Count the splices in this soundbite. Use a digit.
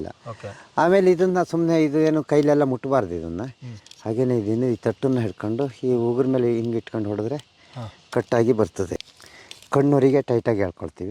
1